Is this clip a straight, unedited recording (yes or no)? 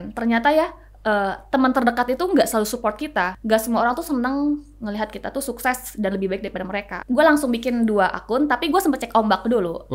no